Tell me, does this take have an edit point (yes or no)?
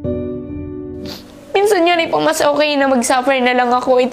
yes